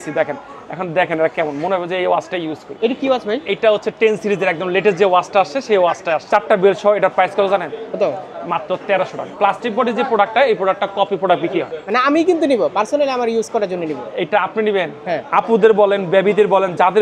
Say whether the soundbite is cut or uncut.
cut